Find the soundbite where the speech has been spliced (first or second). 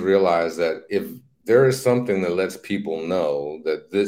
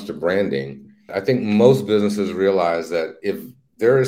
second